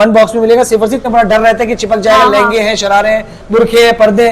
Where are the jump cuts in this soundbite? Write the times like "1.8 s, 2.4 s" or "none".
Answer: 1.0 s